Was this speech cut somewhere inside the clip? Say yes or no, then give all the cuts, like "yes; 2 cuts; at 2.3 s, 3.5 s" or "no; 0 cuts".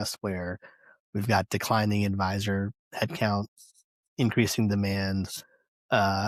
no; 0 cuts